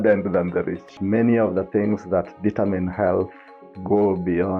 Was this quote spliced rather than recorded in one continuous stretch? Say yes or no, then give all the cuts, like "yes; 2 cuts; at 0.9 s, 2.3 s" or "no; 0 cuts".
yes; 1 cut; at 0.9 s